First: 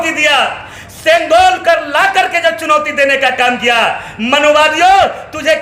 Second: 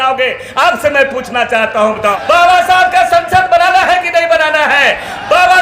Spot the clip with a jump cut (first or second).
second